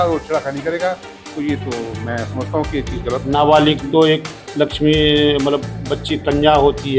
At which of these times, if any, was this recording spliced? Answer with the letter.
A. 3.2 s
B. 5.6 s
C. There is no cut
A